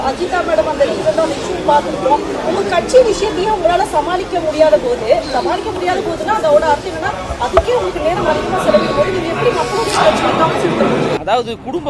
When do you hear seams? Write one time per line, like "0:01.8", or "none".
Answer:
none